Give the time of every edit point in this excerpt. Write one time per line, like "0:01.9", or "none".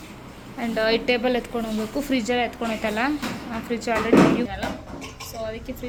none